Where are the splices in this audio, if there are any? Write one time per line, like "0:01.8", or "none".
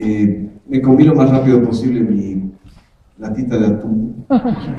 none